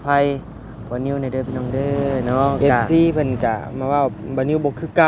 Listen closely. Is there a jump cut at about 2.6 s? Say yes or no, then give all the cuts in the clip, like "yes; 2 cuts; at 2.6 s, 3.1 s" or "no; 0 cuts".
yes; 1 cut; at 2.6 s